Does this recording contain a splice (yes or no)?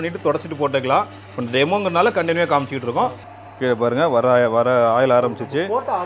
yes